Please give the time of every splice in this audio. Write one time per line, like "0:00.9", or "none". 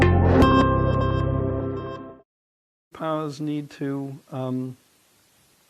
0:02.8